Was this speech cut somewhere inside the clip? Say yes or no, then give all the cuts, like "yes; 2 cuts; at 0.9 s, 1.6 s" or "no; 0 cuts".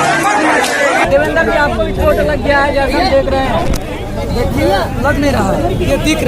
yes; 1 cut; at 0.9 s